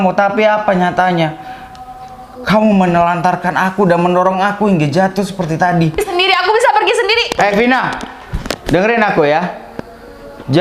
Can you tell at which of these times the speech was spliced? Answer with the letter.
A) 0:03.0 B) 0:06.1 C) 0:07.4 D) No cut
B